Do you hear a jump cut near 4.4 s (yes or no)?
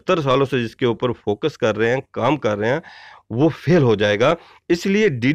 no